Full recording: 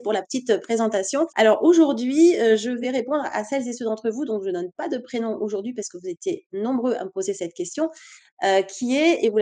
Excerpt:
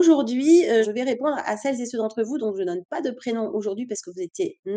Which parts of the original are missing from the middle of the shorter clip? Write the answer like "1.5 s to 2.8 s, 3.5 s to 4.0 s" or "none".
2.6 s to 2.8 s

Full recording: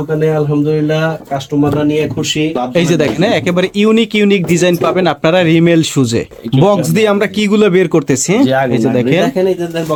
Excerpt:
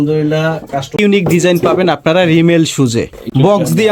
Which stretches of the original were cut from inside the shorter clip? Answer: 1.5 s to 4.1 s

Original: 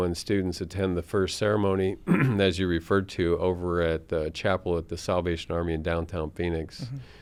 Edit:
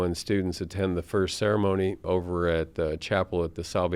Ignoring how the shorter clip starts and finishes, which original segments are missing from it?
2.0 s to 3.4 s

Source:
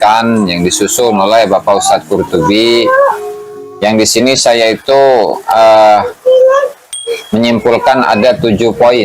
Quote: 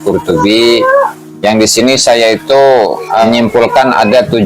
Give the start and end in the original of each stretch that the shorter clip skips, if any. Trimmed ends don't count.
3.3 s to 3.6 s, 5.6 s to 7.4 s

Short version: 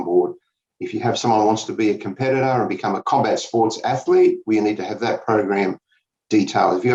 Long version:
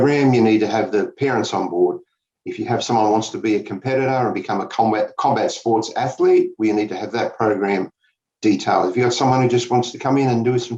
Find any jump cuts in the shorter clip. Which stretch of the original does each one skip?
4.7 s to 5.1 s

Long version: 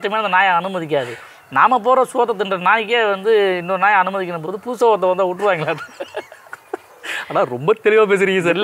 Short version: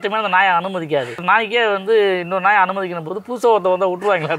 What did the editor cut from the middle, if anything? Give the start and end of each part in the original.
1.2 s to 2.6 s

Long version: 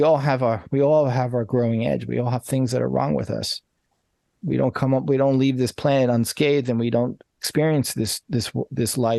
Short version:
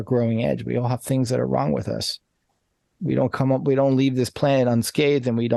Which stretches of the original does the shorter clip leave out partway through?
none

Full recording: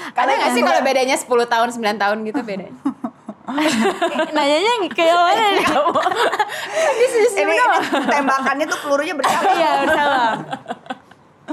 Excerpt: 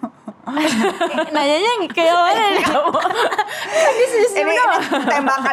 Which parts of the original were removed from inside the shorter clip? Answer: none

